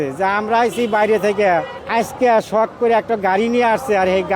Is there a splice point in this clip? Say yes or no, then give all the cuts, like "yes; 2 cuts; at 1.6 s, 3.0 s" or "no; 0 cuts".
yes; 1 cut; at 1.8 s